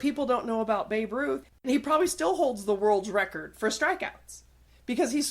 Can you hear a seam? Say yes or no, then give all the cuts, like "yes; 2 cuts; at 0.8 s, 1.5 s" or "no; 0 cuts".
yes; 1 cut; at 1.7 s